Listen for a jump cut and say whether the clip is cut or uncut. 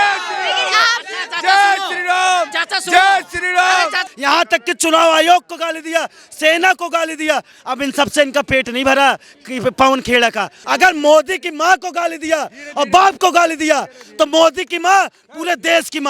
cut